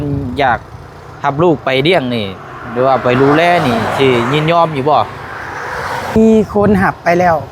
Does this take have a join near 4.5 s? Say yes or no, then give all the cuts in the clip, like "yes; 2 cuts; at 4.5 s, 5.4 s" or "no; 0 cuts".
no; 1 cut; at 6.2 s